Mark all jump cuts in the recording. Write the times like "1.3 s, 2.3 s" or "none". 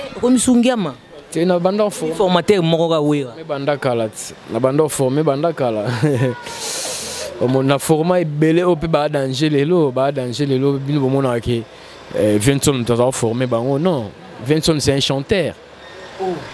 none